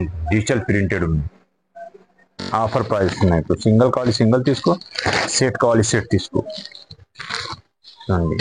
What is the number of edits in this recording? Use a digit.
1